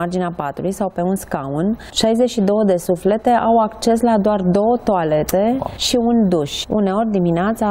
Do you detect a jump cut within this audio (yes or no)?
yes